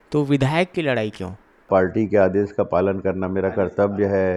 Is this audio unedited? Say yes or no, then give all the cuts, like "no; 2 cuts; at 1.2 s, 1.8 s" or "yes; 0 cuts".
no; 1 cut; at 1.7 s